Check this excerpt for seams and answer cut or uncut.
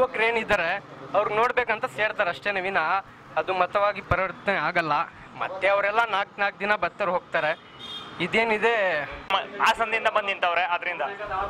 cut